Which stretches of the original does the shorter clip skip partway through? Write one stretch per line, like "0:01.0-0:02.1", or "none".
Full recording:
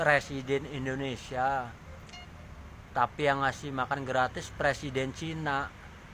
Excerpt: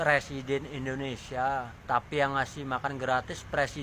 0:01.8-0:02.8